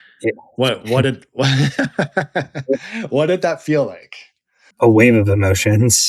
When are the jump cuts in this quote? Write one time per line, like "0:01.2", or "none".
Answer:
0:04.7